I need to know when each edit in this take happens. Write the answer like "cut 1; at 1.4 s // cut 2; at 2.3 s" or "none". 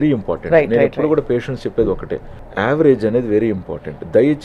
none